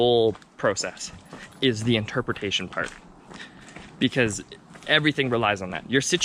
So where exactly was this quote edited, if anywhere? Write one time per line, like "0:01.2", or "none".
none